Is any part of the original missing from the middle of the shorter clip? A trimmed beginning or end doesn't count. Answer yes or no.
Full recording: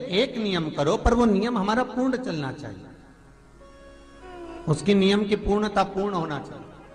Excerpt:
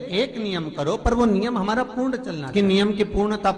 yes